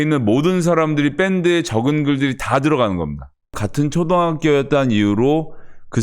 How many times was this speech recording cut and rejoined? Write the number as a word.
one